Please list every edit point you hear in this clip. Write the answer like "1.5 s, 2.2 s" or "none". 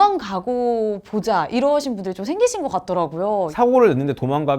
3.5 s